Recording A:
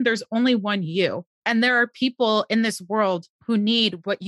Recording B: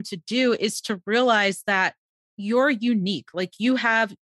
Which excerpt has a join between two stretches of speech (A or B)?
A